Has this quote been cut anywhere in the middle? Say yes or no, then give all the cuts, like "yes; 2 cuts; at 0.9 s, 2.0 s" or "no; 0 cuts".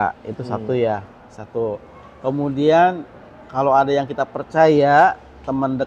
no; 0 cuts